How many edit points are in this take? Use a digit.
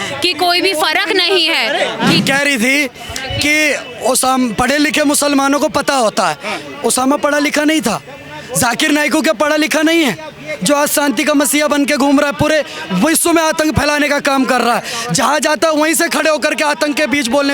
1